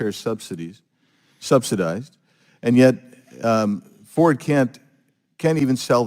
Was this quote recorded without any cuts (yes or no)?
yes